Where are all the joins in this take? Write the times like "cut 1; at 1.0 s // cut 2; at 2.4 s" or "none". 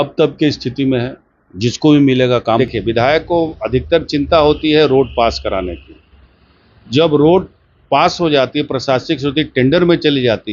cut 1; at 2.6 s